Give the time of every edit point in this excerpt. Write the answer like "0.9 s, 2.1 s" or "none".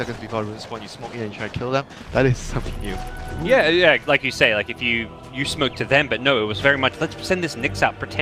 none